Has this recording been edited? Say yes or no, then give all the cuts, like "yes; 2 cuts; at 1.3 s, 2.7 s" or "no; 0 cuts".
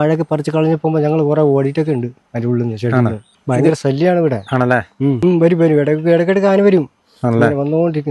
yes; 2 cuts; at 3.2 s, 5.2 s